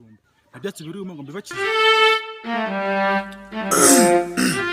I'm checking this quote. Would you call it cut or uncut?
cut